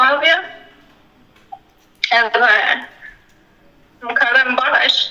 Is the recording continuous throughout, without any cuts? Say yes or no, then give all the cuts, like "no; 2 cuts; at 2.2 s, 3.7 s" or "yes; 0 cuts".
yes; 0 cuts